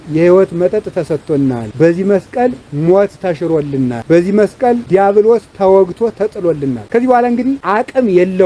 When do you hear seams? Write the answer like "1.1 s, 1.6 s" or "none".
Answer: 1.7 s, 4.0 s, 4.8 s, 6.8 s, 7.6 s